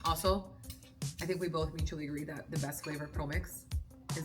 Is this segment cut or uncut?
uncut